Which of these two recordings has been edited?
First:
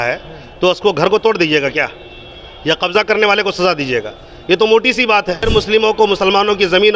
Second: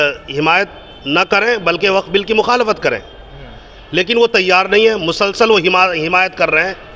first; 1 cut; at 5.4 s

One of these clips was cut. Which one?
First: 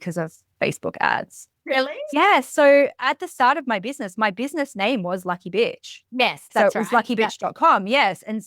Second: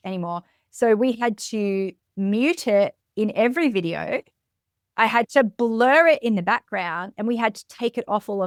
first; 1 cut; at 2.1 s

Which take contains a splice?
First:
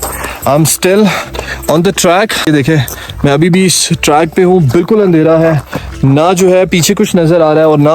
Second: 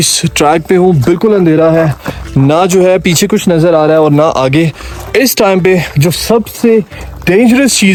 first; 1 cut; at 2.5 s

